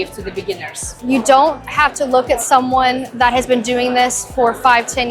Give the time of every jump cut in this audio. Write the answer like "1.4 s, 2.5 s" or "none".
0.9 s, 3.1 s